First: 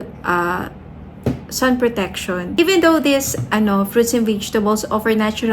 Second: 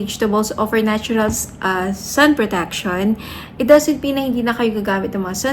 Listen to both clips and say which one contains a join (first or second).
first